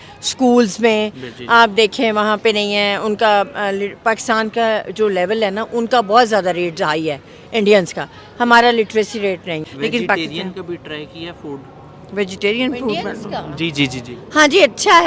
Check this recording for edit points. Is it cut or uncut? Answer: cut